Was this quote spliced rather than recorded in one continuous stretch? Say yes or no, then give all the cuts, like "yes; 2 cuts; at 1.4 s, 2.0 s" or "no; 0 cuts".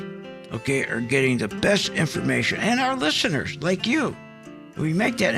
no; 0 cuts